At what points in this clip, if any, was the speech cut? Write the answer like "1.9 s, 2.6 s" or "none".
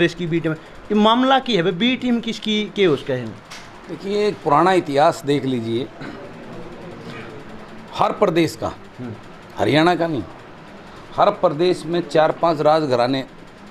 none